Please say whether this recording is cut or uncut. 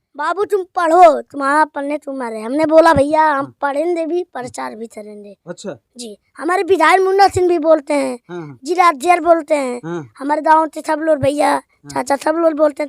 uncut